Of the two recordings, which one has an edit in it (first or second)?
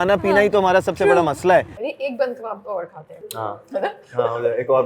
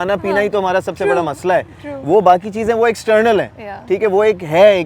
first